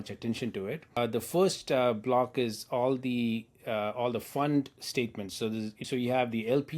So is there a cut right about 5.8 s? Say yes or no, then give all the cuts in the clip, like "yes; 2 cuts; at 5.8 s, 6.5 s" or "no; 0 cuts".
yes; 2 cuts; at 1.0 s, 5.8 s